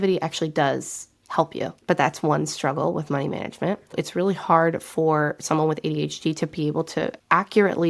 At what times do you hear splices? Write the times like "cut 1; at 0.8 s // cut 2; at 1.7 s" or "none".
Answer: cut 1; at 1.7 s // cut 2; at 3.9 s